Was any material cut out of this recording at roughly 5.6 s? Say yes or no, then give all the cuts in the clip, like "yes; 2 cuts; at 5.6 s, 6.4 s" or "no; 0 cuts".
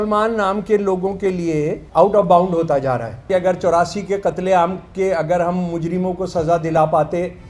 no; 2 cuts; at 1.8 s, 3.3 s